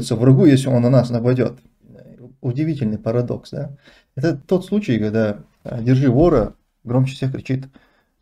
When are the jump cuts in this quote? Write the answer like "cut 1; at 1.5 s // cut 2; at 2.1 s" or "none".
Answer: cut 1; at 2.2 s